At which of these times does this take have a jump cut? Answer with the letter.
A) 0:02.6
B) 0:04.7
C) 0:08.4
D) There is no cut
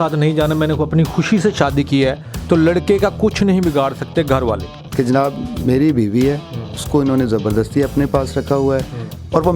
B